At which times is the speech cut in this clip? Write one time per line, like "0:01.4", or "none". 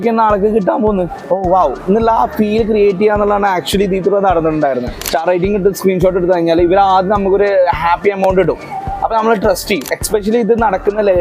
0:01.2
0:05.0
0:10.0